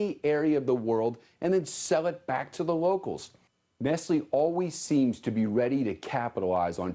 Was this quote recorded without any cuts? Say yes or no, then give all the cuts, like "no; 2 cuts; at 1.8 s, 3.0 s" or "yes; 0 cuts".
no; 1 cut; at 2.5 s